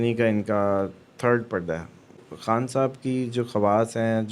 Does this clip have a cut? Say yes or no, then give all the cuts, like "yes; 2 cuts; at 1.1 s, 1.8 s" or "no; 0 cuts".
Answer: yes; 1 cut; at 2.1 s